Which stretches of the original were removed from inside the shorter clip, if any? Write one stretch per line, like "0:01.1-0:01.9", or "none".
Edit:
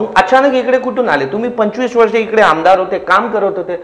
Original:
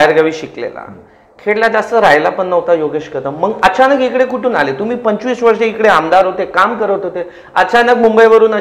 none